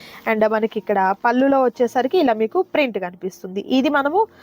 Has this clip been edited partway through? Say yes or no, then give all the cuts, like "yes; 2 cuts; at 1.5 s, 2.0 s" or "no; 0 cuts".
no; 0 cuts